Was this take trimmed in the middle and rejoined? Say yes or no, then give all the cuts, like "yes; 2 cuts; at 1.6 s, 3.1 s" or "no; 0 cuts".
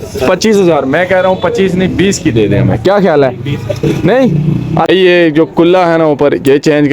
yes; 1 cut; at 4.9 s